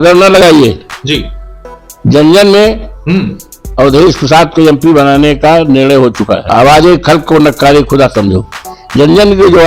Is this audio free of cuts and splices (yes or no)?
yes